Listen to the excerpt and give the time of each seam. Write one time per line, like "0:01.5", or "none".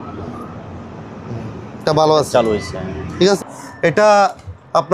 0:03.4